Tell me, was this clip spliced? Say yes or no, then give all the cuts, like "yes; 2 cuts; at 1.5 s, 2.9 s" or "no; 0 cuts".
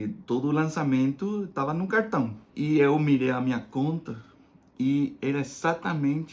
yes; 1 cut; at 2.4 s